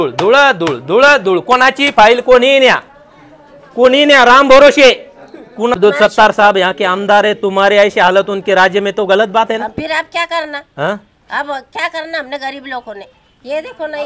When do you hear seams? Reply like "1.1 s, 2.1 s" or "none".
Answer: 5.8 s